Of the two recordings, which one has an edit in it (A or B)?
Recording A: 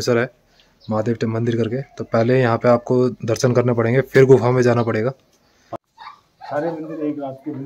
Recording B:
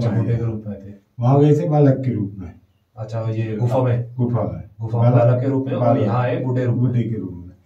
A